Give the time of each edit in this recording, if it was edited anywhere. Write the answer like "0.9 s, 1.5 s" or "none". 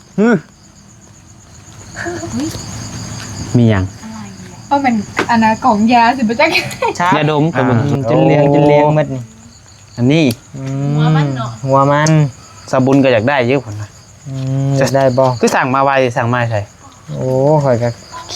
7.8 s